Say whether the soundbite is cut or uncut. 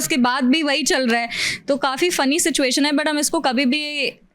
uncut